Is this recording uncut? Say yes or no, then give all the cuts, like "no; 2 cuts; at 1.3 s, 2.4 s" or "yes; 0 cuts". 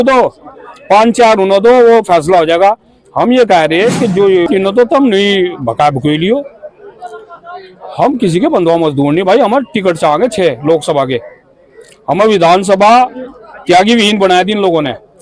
no; 1 cut; at 4.5 s